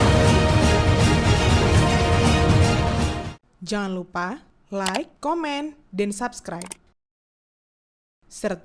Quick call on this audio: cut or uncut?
cut